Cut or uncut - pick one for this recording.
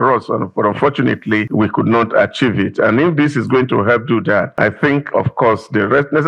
cut